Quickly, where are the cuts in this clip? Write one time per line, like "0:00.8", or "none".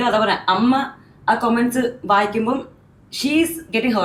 none

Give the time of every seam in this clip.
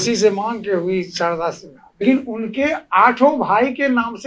0:02.0

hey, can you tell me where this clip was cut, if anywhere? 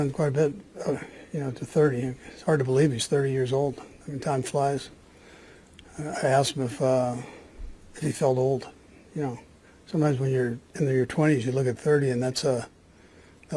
none

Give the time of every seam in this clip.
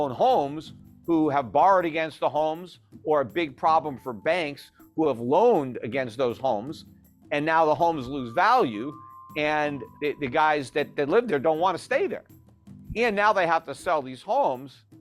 0:09.8

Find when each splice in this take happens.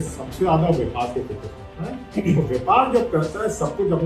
none

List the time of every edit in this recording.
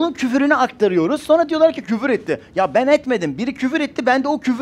none

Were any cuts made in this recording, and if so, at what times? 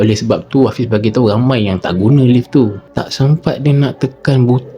0:02.8

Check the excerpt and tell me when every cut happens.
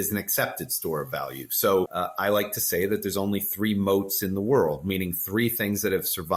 0:01.9

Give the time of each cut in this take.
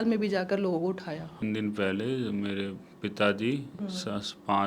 0:01.4

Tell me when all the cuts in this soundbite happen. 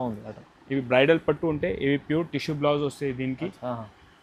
none

